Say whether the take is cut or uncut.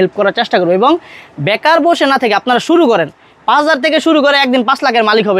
uncut